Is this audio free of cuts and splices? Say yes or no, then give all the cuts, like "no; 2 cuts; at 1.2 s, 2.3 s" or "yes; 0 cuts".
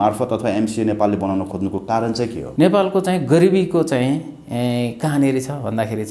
no; 1 cut; at 2.4 s